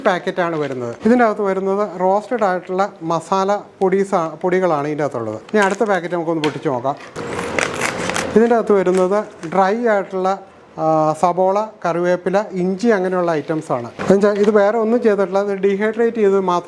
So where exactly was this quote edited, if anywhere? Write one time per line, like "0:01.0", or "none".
0:00.9
0:05.4